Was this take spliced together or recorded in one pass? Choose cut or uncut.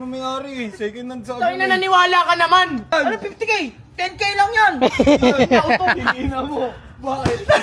cut